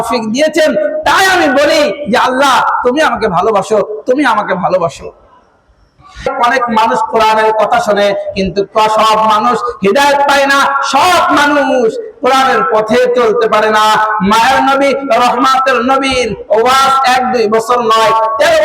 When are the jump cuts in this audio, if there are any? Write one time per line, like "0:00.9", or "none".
0:06.3